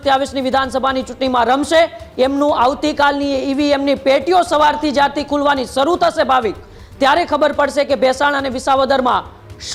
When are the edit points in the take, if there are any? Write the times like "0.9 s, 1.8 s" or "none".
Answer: none